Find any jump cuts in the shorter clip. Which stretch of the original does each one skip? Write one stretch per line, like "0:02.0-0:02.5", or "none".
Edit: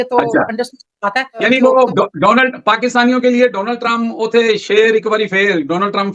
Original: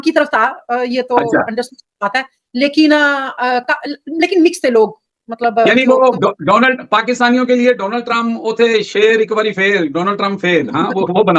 0:02.4-0:05.7